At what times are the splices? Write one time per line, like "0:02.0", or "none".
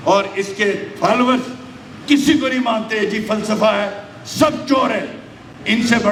none